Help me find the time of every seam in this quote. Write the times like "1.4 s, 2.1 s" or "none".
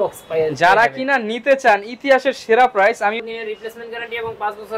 3.2 s